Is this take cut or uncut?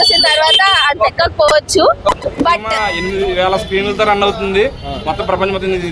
cut